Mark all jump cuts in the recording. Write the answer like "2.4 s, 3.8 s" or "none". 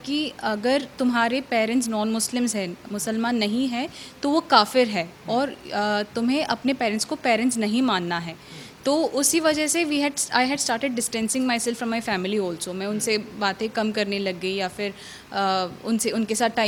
none